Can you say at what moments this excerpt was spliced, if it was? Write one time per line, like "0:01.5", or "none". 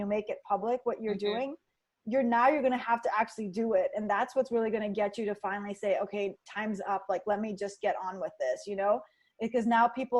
none

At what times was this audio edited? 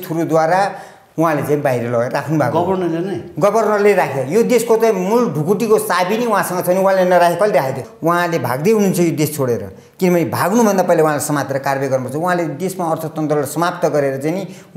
0:07.9

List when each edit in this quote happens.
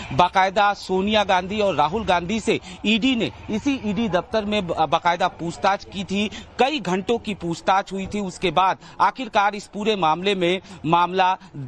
0:09.7

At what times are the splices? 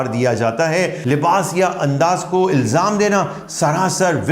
0:01.0

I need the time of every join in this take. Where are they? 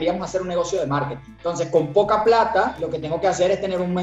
0:01.2
0:02.8

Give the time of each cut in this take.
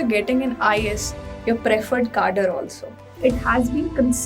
0:03.2

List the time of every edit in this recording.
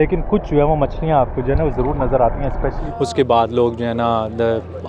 0:02.8

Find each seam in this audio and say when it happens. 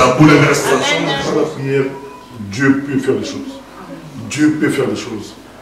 0:01.2

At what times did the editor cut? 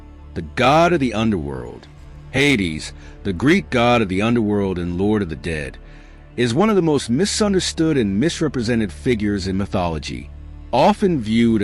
0:01.1

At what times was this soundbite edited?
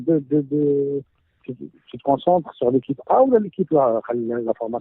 0:01.6

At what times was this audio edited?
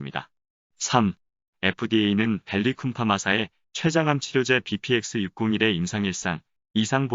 0:01.8

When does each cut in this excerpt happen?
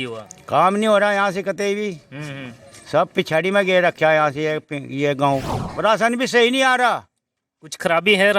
0:05.6

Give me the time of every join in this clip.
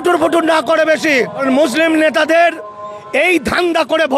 0:01.4

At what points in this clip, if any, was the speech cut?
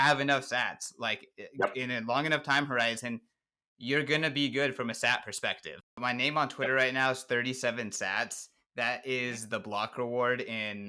0:05.9

